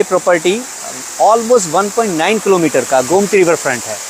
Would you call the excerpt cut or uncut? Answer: uncut